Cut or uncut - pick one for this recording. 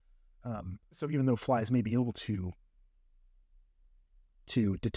cut